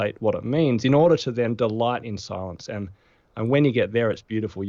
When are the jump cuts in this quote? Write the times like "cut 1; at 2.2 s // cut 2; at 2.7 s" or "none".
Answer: none